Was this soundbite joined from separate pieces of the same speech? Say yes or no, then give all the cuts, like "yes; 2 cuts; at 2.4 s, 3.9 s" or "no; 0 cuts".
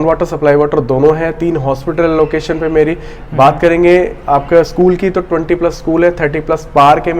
no; 0 cuts